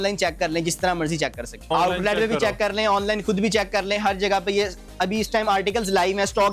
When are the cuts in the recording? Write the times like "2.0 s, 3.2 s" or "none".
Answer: 1.7 s

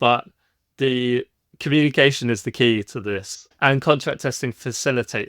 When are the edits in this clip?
3.4 s

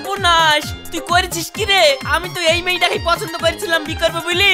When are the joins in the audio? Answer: none

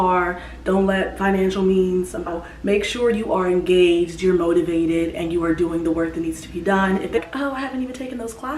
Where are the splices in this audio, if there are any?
2.3 s, 7.2 s

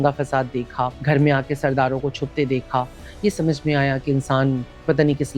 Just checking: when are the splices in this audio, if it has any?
1.0 s

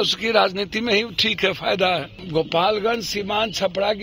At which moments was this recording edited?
2.2 s

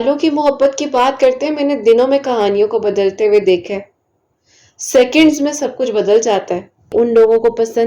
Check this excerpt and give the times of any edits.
6.9 s

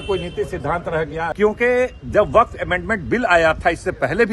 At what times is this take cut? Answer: 1.3 s

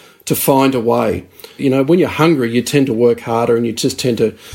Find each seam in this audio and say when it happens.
1.6 s

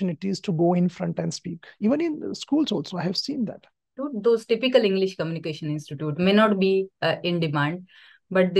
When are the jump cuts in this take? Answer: 4.0 s

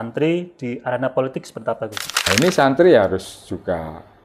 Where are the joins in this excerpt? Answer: 2.2 s

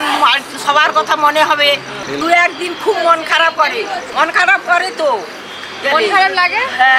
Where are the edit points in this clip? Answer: 2.0 s, 4.1 s

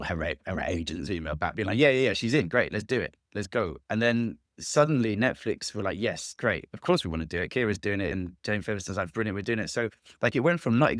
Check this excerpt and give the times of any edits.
1.5 s, 8.1 s

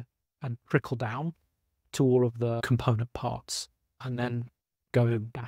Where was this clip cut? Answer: 2.7 s, 4.0 s

